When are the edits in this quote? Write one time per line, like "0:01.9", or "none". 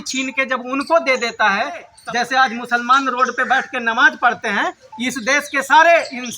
0:01.9